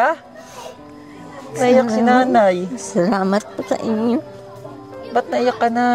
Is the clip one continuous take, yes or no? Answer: yes